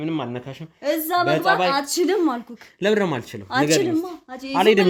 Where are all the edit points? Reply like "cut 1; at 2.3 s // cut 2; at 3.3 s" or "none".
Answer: none